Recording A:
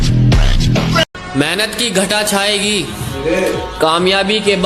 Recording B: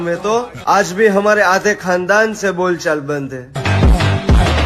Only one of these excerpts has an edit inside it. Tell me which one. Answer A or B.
A